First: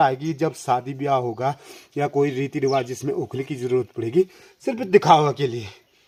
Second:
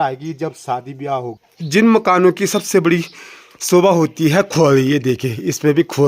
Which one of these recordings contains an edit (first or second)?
second